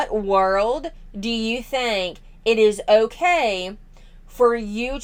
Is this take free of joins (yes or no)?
yes